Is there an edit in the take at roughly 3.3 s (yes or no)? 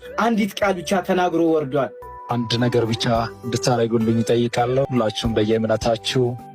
no